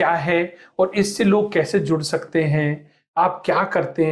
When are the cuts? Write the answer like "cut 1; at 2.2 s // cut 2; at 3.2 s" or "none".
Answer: none